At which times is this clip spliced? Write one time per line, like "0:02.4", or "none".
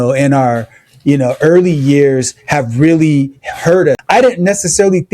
0:04.0